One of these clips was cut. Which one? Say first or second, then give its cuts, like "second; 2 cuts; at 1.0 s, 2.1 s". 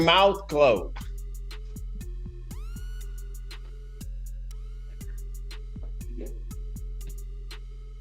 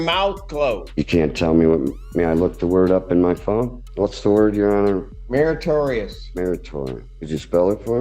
second; 4 cuts; at 0.9 s, 3.8 s, 5.1 s, 7.1 s